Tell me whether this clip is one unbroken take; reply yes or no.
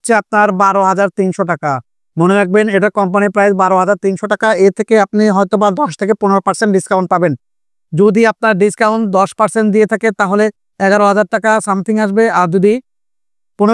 yes